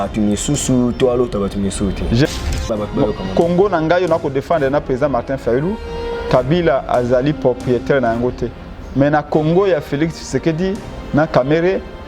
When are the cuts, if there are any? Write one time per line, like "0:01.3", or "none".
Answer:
0:02.3